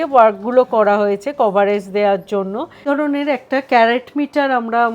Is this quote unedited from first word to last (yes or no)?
no